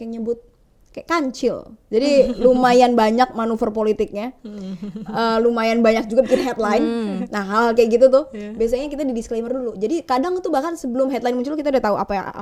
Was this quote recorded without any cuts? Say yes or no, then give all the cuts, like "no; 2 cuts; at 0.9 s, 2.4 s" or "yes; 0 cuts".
yes; 0 cuts